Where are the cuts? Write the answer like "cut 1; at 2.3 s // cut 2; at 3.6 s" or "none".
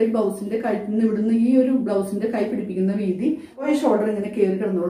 cut 1; at 3.6 s

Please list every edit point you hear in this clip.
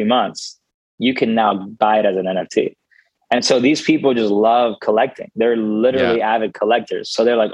none

